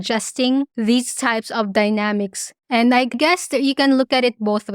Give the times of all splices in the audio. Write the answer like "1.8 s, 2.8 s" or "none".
3.1 s